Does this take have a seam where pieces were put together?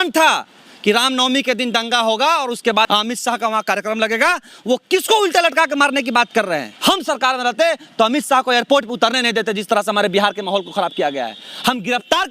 yes; 2 cuts; at 2.9 s, 6.7 s

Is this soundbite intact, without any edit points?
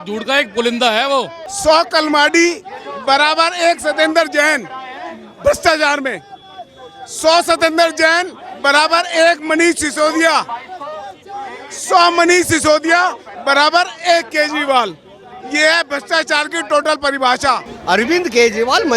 no; 2 cuts; at 1.4 s, 17.7 s

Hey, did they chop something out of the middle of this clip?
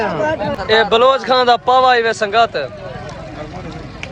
no; 0 cuts

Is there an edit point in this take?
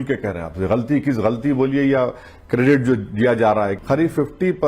yes; 1 cut; at 3.8 s

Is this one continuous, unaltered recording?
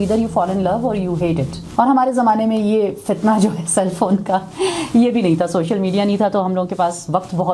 no; 1 cut; at 1.6 s

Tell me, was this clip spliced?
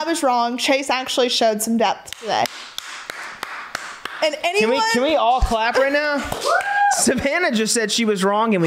no; 0 cuts

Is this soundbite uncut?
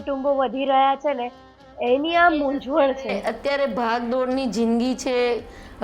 yes; 0 cuts

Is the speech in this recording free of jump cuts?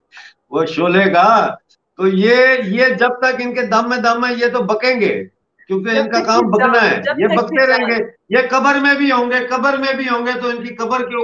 yes; 0 cuts

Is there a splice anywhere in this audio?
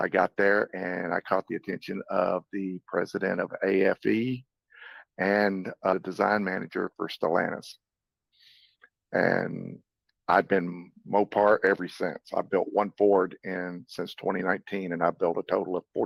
no; 0 cuts

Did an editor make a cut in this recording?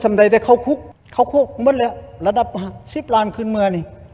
yes; 1 cut; at 1.0 s

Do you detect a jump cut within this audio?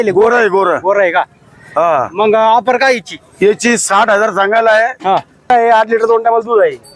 yes; 1 cut; at 5.5 s

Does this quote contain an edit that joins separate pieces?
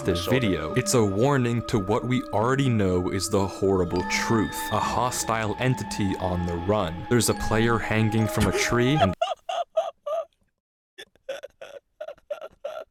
no; 0 cuts

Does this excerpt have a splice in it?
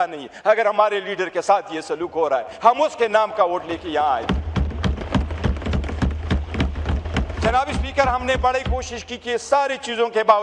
no; 0 cuts

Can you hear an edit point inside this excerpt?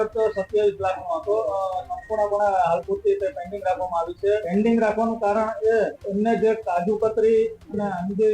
yes; 2 cuts; at 4.4 s, 6.0 s

